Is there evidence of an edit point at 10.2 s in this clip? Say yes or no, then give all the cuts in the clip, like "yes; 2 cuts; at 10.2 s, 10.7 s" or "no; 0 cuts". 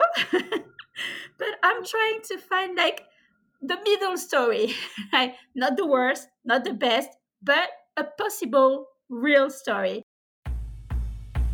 yes; 1 cut; at 10.2 s